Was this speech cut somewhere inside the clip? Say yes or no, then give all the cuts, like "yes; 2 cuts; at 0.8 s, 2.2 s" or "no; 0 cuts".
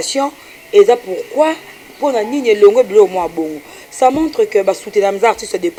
no; 0 cuts